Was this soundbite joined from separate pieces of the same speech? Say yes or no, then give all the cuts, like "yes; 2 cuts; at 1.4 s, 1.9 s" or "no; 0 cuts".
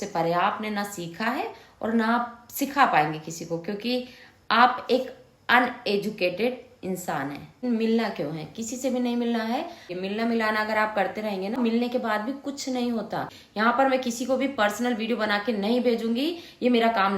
yes; 4 cuts; at 7.6 s, 9.9 s, 11.6 s, 13.4 s